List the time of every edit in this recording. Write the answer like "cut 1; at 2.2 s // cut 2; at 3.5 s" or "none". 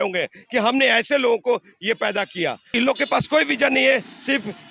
cut 1; at 2.7 s